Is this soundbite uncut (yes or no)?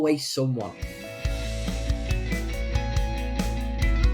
no